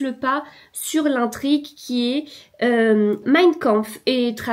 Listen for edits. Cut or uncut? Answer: uncut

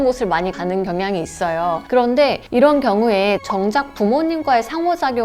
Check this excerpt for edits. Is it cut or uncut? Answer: cut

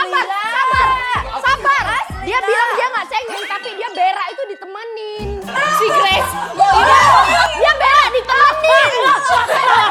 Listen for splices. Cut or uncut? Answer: uncut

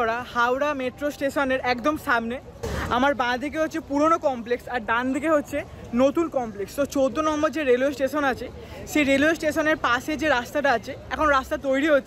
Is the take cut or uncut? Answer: uncut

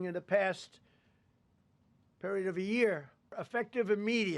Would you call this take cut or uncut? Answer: cut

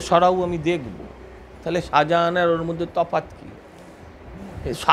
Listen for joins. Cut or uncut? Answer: uncut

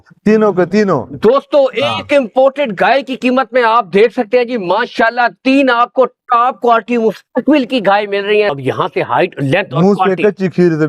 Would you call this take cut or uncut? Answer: cut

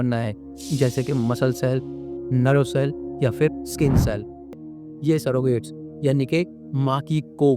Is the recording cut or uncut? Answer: cut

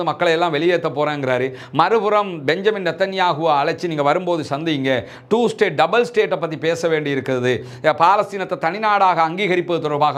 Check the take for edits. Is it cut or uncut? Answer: uncut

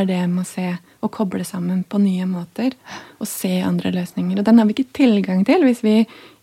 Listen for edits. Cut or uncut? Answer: uncut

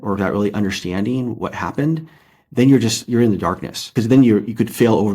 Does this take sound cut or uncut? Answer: cut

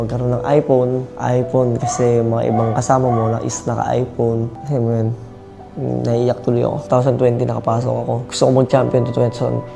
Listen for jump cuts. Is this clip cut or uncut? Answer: cut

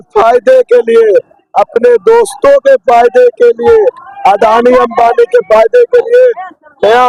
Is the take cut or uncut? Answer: uncut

